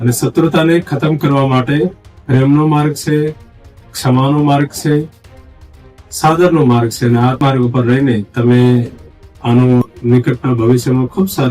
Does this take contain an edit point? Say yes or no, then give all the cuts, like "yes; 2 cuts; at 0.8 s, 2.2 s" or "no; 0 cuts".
no; 0 cuts